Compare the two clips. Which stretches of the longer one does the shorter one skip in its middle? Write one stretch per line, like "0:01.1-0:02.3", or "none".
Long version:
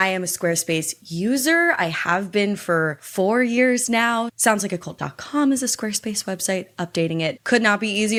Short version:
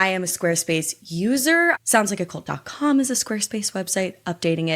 0:01.8-0:04.3